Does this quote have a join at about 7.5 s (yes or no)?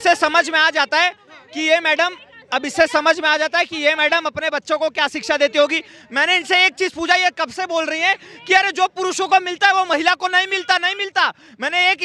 no